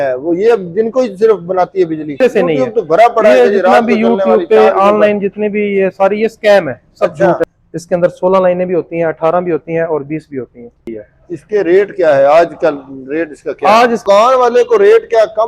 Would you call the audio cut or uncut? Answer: cut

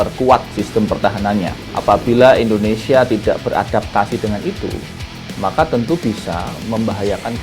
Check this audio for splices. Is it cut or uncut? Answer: cut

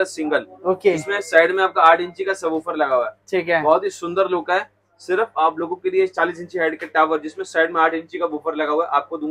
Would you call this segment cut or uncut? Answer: uncut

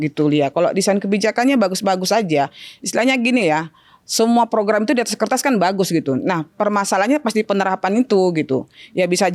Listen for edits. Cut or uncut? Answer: uncut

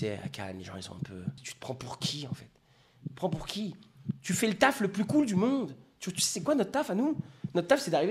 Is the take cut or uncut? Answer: cut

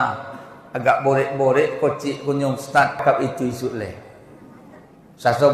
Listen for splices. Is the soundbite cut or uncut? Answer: cut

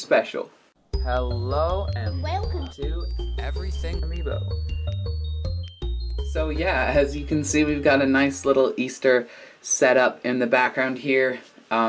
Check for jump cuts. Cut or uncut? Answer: uncut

